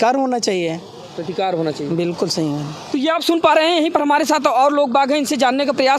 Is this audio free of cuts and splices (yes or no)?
yes